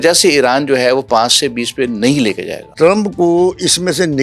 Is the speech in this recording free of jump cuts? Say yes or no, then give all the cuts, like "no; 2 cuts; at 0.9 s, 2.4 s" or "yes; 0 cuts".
no; 1 cut; at 2.6 s